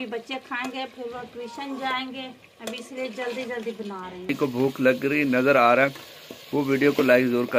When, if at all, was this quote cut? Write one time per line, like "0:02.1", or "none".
0:04.3